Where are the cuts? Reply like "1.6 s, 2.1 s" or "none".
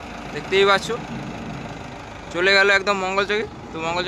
none